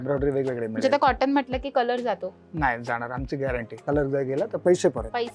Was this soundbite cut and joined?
yes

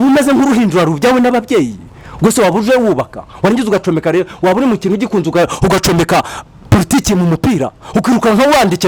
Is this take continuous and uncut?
yes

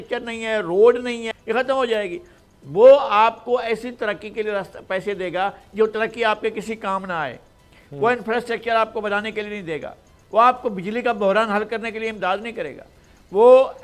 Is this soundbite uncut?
yes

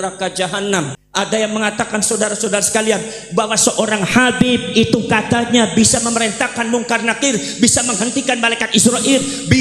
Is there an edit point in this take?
yes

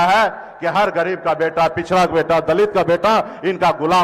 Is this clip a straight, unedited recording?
yes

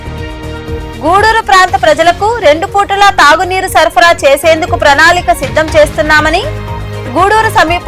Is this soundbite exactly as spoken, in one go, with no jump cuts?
no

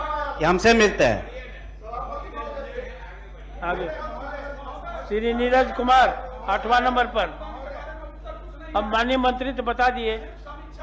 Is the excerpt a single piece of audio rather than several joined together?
yes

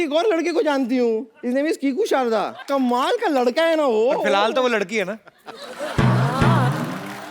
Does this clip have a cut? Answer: yes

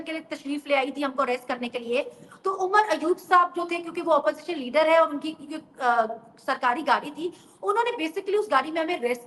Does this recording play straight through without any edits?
yes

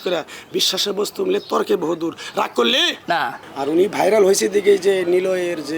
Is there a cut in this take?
yes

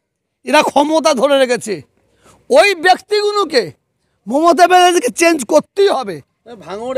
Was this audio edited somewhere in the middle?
no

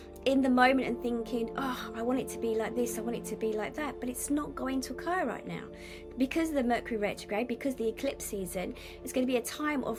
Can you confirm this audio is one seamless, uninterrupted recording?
yes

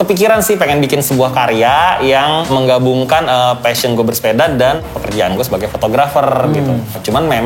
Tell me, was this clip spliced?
no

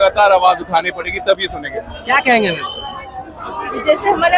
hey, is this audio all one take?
yes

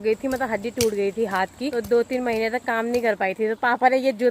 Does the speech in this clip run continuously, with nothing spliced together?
no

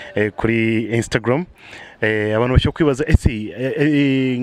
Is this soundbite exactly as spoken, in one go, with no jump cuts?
yes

